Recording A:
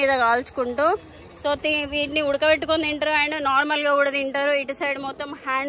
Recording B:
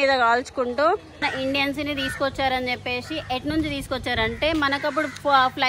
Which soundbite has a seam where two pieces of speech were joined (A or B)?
B